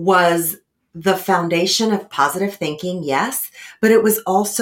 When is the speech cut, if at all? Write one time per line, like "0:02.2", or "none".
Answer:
0:02.1

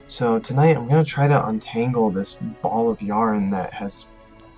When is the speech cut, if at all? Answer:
none

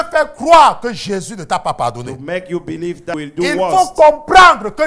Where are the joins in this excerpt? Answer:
0:03.1

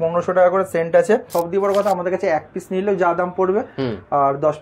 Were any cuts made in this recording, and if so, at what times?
0:01.3

